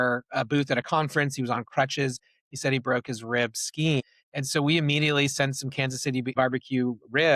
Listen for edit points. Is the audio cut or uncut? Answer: cut